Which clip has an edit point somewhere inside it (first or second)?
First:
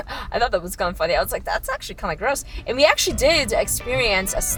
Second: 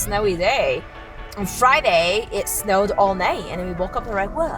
second